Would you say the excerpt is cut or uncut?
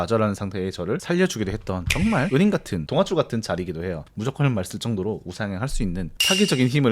cut